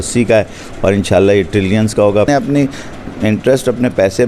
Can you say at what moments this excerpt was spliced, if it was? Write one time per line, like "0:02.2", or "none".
0:02.3